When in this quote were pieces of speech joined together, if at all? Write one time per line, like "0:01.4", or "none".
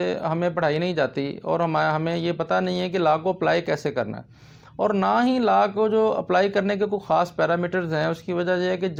none